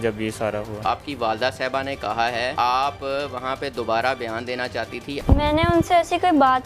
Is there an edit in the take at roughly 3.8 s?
no; 3 cuts; at 0.8 s, 2.5 s, 5.2 s

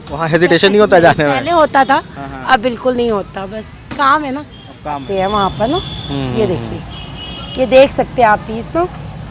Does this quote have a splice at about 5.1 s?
yes; 1 cut; at 5.1 s

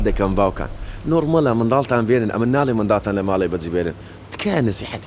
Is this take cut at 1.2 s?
no; 0 cuts

